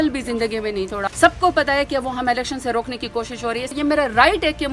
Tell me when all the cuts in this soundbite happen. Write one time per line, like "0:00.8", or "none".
0:01.0
0:03.7